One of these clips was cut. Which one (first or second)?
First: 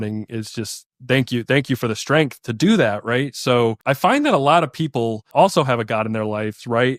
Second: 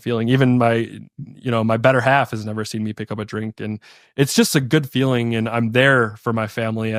first